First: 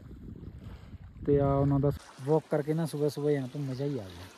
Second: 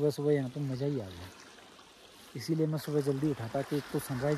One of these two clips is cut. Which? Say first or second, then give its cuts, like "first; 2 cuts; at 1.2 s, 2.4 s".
first; 1 cut; at 2.0 s